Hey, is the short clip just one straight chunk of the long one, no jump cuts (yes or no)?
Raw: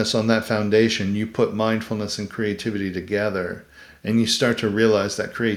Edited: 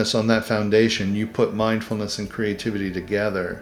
yes